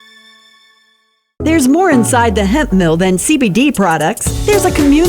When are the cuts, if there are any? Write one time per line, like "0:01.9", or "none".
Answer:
0:01.3